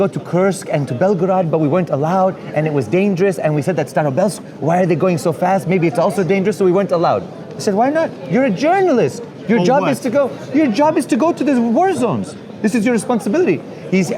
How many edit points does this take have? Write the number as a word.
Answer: zero